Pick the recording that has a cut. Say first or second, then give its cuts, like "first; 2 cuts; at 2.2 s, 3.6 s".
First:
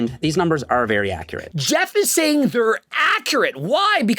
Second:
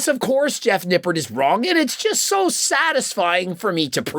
first; 1 cut; at 1.4 s